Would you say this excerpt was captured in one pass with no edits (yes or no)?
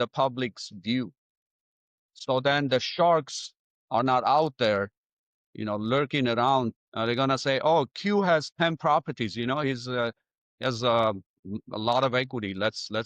no